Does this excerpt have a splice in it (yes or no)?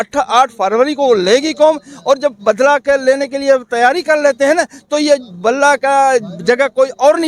no